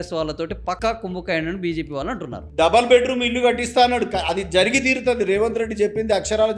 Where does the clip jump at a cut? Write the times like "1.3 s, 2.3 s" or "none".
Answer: 2.4 s